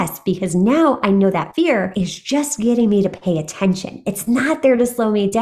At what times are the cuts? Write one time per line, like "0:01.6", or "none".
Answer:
0:01.6